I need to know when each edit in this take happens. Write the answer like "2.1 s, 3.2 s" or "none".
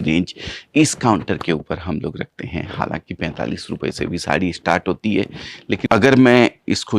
5.9 s